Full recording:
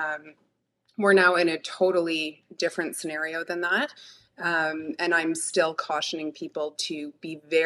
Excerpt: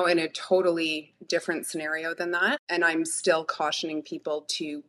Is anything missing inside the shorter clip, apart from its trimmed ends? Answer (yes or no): yes